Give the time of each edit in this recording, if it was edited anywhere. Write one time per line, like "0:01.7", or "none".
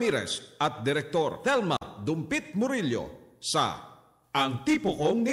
none

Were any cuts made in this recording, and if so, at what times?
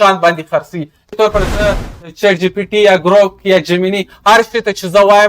0:01.1

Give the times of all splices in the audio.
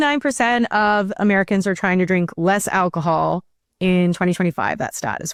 none

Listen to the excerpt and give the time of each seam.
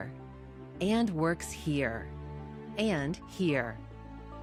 none

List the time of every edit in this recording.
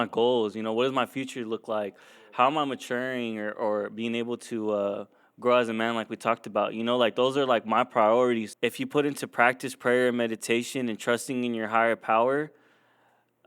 0:08.5

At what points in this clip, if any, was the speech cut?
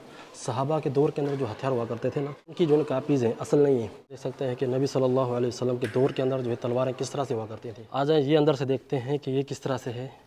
0:02.4
0:04.3
0:08.0

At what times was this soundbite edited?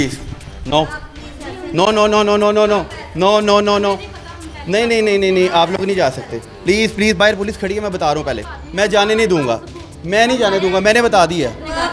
none

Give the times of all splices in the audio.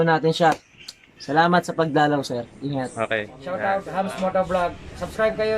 0:03.3

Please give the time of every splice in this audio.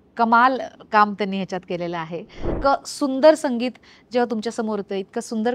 0:02.4

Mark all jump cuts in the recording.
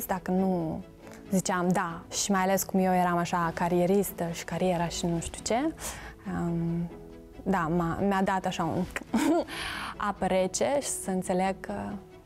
0:02.0

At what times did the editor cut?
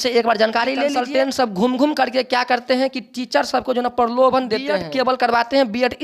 0:01.0
0:04.7

